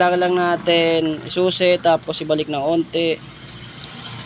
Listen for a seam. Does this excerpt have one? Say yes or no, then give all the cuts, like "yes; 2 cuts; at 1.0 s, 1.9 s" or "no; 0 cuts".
no; 0 cuts